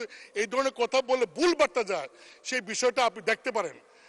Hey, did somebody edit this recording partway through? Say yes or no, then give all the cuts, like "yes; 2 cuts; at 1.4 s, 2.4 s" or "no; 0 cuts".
no; 0 cuts